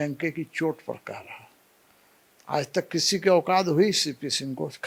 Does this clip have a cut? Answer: no; 0 cuts

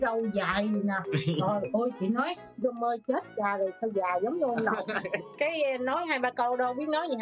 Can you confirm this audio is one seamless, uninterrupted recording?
yes; 0 cuts

